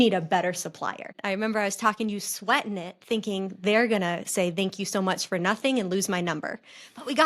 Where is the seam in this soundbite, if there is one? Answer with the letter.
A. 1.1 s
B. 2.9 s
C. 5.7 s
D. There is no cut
A